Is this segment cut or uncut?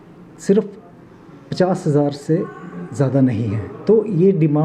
cut